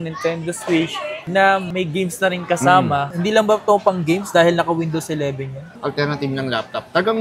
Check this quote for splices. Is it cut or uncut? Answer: cut